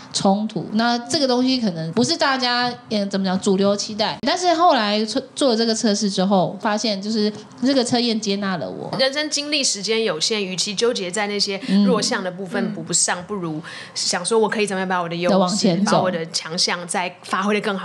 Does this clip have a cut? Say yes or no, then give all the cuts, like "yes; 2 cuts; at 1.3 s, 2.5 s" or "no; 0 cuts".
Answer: yes; 4 cuts; at 1.9 s, 4.2 s, 6.6 s, 8.9 s